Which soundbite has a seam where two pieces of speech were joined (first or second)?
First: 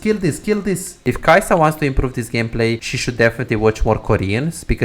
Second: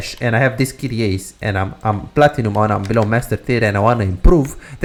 first